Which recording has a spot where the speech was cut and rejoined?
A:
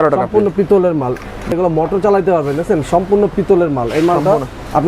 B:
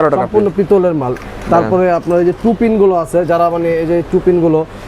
A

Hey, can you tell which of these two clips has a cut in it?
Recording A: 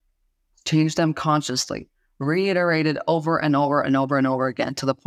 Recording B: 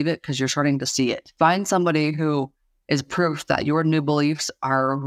B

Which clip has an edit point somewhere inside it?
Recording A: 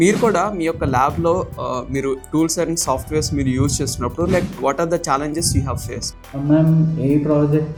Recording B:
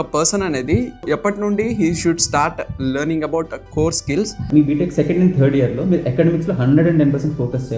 B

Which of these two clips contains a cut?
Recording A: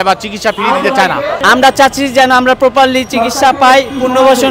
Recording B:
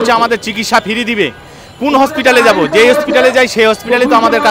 A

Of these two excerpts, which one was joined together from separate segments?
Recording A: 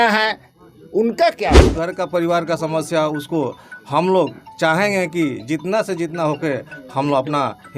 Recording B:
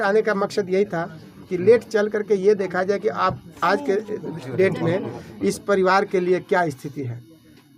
A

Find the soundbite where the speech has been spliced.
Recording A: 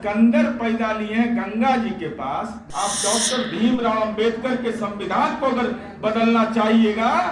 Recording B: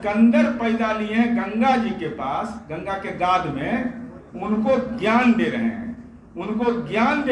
A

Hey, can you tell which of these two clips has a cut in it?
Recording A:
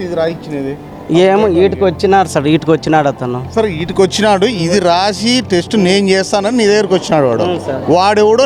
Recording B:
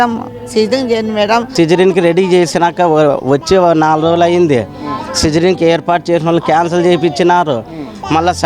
B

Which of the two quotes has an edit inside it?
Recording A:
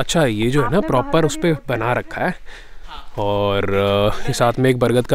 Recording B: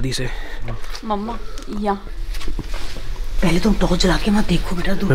B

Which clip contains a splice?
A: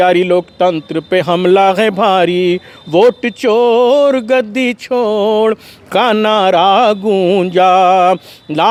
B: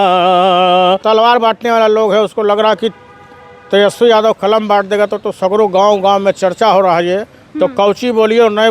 B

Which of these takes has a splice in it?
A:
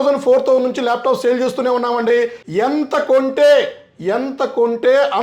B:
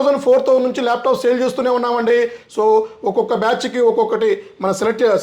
A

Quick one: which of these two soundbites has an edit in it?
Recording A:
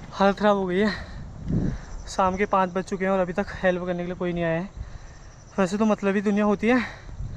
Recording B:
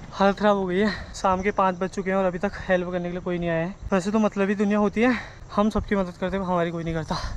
B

